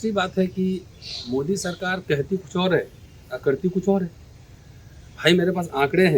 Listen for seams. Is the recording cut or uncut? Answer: uncut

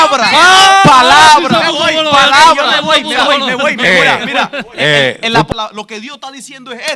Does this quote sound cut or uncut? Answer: cut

